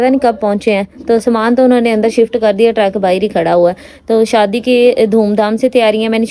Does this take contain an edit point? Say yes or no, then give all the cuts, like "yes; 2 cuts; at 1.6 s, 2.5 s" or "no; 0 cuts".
no; 0 cuts